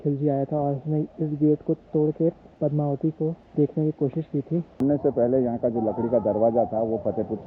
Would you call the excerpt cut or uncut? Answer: cut